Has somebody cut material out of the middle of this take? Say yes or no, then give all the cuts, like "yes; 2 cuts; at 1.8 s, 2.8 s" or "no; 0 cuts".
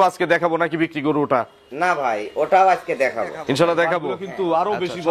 yes; 1 cut; at 4.2 s